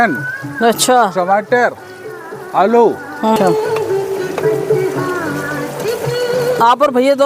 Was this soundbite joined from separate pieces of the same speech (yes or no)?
yes